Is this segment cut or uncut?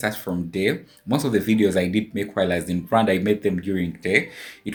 uncut